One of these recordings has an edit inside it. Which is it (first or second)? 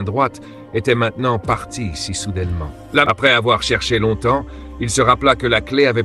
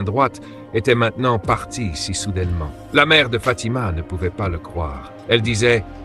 first